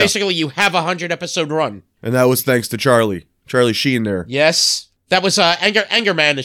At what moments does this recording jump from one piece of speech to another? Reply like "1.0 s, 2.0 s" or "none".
1.9 s, 5.0 s